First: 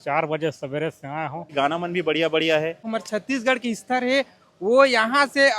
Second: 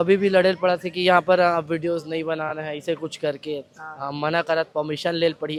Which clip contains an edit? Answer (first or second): first